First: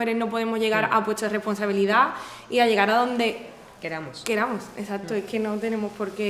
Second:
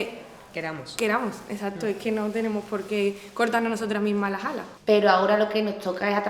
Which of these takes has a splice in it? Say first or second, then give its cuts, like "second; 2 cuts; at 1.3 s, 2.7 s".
second; 1 cut; at 4.7 s